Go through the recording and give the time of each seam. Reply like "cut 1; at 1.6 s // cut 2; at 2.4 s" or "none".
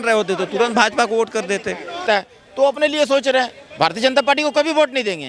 cut 1; at 2.0 s